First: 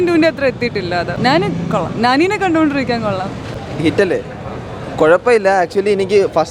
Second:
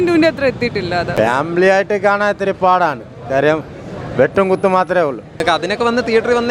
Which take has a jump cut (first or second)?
second